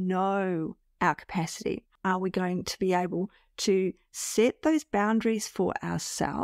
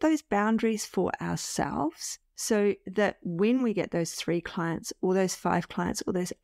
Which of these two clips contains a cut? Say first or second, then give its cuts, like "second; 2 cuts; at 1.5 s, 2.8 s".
first; 1 cut; at 1.9 s